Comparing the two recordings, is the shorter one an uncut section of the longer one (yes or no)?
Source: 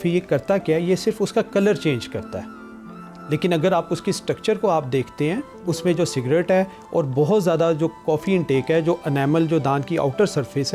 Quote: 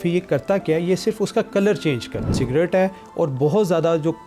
no